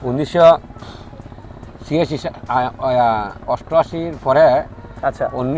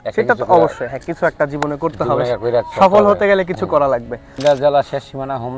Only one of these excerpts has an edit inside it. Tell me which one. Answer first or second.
second